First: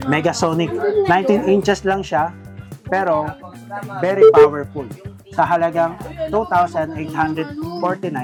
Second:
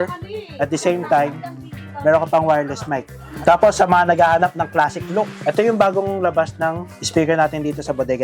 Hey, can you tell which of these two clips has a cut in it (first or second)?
second